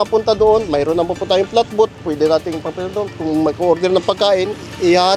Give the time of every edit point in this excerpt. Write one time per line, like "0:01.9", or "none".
none